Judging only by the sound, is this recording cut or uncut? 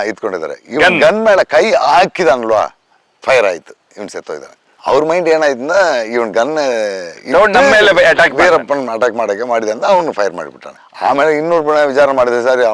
uncut